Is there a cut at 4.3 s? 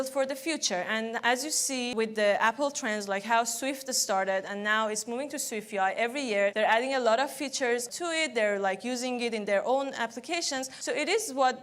no; 4 cuts; at 1.9 s, 6.5 s, 7.9 s, 10.7 s

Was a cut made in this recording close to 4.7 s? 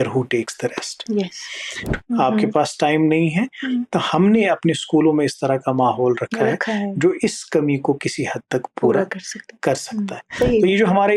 no; 2 cuts; at 1.9 s, 10.2 s

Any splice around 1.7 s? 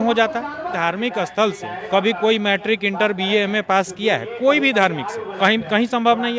yes; 3 cuts; at 0.7 s, 1.7 s, 5.2 s

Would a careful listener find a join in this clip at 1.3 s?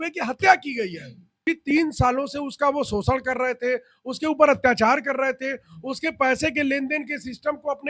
yes; 1 cut; at 1.3 s

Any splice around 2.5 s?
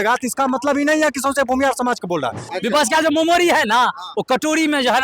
yes; 1 cut; at 2.5 s

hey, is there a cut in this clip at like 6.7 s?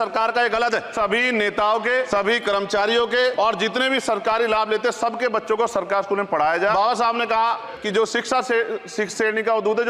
yes; 5 cuts; at 0.9 s, 2.1 s, 3.3 s, 6.7 s, 7.7 s

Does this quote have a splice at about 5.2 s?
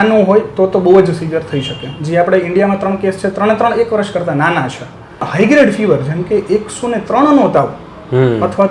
yes; 1 cut; at 5.2 s

